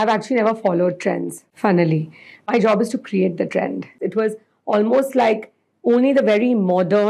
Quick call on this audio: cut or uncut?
cut